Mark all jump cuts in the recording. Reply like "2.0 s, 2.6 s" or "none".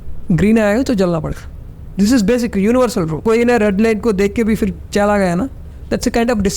3.2 s